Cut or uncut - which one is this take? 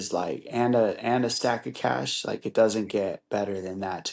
uncut